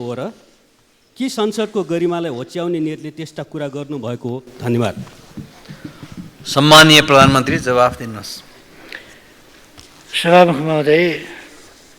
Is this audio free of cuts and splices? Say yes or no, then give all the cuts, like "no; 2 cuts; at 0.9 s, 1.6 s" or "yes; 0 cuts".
yes; 0 cuts